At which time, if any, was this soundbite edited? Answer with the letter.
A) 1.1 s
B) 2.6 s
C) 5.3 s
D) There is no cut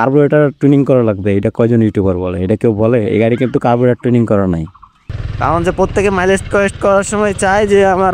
C